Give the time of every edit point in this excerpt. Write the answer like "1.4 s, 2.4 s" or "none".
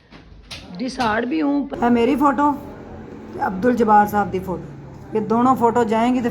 1.7 s